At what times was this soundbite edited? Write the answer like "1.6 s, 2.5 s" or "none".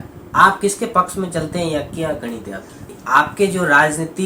2.8 s